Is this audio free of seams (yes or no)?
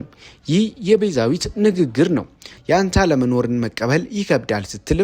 no